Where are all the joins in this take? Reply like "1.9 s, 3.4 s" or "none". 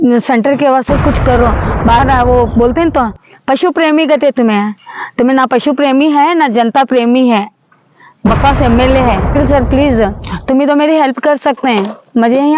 2.0 s, 9.3 s